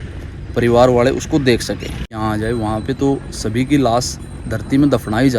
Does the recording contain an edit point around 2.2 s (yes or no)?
yes